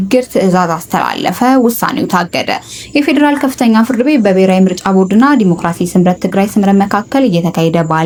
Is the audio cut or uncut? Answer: uncut